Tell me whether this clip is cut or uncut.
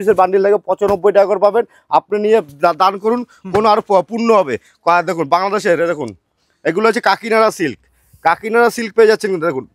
uncut